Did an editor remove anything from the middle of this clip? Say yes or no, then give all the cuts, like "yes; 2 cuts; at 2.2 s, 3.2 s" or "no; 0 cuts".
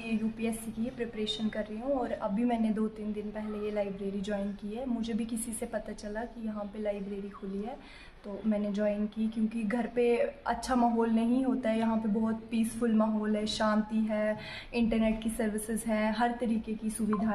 no; 0 cuts